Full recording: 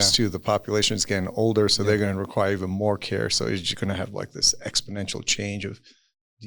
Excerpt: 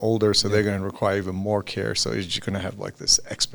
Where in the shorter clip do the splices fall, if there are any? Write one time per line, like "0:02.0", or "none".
none